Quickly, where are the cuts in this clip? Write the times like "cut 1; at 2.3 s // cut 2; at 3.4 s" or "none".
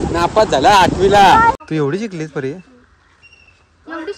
cut 1; at 1.6 s